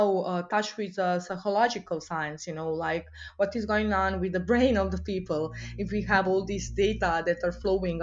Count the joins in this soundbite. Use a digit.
0